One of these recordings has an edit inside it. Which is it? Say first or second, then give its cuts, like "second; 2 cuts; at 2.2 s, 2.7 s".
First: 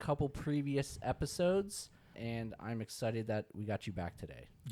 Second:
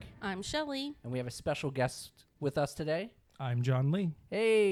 first; 1 cut; at 2.2 s